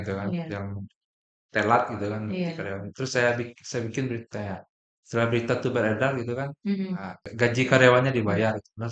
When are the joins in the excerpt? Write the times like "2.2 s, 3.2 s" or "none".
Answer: 7.2 s